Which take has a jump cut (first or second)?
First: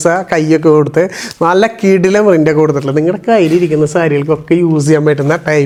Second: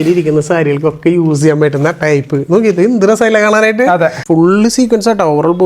second